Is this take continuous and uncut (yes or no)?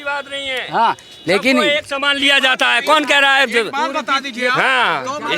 yes